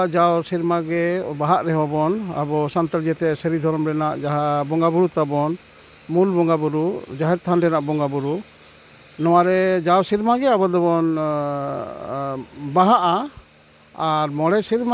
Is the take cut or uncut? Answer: uncut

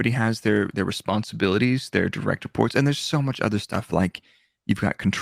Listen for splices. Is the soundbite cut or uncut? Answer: uncut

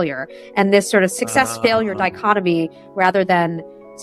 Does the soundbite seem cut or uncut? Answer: cut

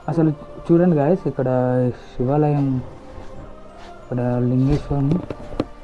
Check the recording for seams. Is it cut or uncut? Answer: uncut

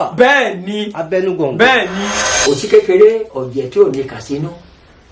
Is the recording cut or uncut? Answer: cut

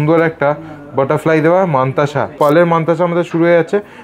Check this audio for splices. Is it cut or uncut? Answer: cut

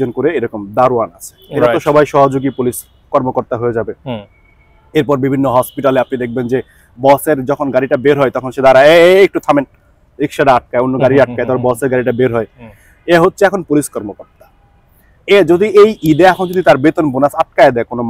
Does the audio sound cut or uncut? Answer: uncut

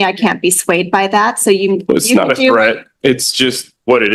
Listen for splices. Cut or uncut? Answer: uncut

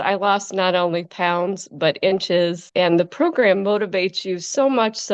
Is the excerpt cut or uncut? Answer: cut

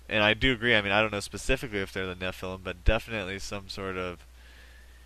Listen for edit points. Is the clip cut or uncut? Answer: cut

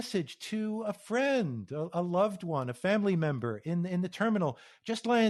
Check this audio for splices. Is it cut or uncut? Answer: uncut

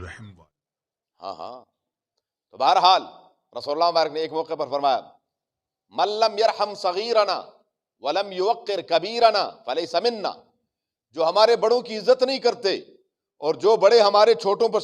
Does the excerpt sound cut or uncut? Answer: uncut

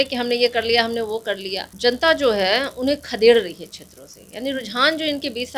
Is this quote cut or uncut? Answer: cut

